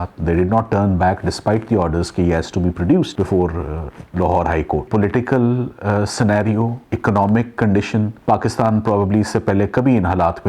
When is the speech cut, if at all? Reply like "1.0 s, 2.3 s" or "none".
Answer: 4.9 s, 6.8 s, 8.1 s